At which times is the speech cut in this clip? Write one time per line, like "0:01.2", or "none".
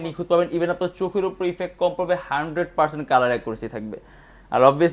none